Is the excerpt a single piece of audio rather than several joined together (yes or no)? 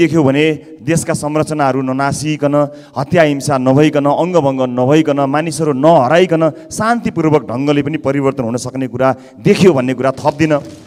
yes